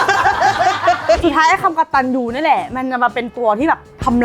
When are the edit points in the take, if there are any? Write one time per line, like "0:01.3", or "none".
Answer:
0:01.2